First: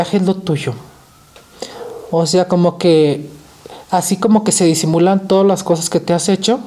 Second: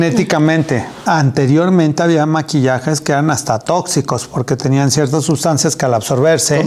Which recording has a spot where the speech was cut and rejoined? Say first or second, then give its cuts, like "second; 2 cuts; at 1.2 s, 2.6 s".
second; 1 cut; at 1.0 s